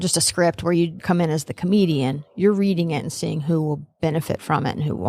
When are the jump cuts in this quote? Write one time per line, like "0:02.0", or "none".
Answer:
0:01.0